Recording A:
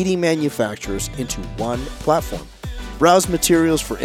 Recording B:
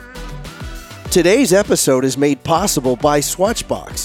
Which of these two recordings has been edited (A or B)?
B